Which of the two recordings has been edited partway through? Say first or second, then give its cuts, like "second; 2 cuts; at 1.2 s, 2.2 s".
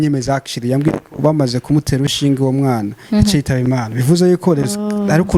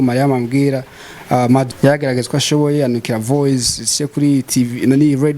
second; 1 cut; at 1.7 s